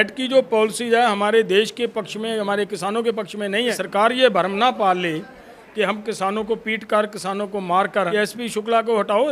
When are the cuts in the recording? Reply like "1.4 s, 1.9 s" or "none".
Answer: 3.8 s, 8.1 s